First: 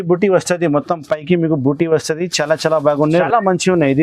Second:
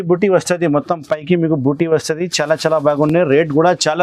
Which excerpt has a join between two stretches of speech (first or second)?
first